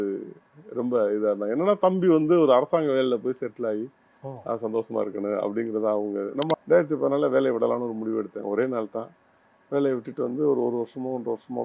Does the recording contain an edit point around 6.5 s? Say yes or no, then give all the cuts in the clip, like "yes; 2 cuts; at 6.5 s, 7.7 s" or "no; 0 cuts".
yes; 1 cut; at 6.5 s